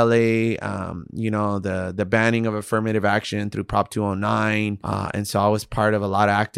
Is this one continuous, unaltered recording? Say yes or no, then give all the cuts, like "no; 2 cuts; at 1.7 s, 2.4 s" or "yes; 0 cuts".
no; 1 cut; at 4.8 s